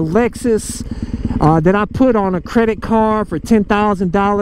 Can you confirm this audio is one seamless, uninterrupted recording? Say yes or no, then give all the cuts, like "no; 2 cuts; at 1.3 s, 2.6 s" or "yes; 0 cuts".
yes; 0 cuts